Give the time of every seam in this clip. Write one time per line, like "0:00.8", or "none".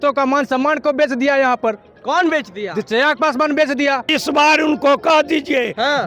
0:04.1